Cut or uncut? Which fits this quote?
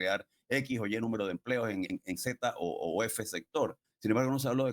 cut